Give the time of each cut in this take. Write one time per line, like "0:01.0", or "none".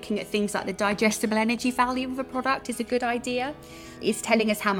0:03.9